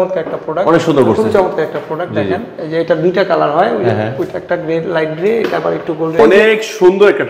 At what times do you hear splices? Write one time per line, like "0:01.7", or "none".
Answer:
0:06.2